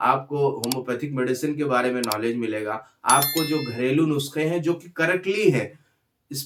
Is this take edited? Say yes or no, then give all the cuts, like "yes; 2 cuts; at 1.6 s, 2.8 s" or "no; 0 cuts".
no; 0 cuts